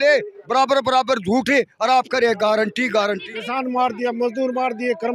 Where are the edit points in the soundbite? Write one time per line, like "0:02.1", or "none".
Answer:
0:03.3